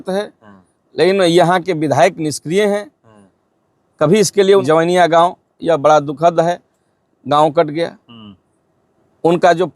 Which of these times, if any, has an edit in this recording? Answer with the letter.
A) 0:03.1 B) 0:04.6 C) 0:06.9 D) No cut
B